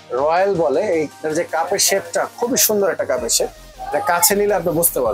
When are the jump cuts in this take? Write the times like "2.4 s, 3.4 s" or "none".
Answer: none